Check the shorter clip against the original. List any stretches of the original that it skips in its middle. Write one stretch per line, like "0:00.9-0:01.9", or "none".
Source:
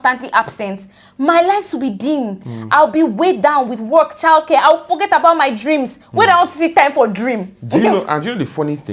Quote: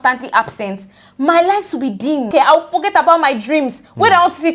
0:02.3-0:04.5